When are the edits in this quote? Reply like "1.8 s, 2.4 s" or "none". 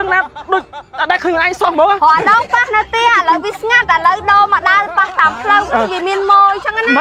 none